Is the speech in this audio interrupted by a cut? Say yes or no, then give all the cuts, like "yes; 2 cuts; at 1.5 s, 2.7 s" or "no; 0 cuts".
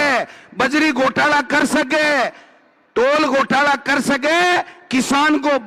no; 0 cuts